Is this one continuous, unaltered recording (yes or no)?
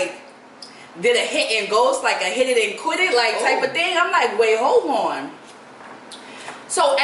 yes